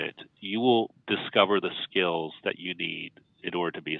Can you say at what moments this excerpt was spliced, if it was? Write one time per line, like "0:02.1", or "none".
0:01.0